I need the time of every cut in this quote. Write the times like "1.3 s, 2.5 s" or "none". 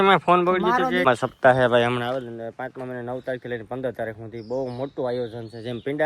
1.1 s